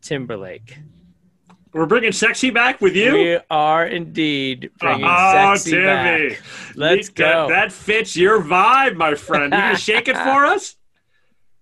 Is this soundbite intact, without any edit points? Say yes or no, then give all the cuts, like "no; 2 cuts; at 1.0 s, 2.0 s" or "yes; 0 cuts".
yes; 0 cuts